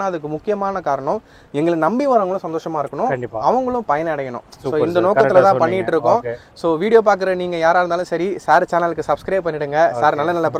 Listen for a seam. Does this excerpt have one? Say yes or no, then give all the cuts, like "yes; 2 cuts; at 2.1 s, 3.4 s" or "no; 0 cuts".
no; 0 cuts